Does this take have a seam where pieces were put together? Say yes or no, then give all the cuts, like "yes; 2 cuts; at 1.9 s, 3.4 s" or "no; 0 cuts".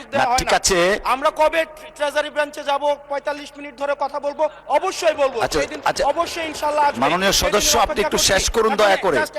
no; 0 cuts